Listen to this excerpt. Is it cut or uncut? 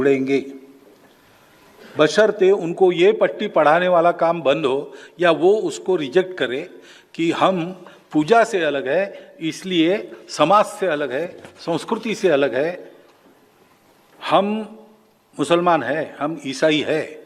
uncut